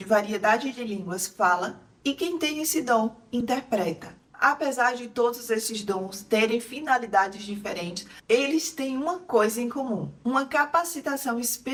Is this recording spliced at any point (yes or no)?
no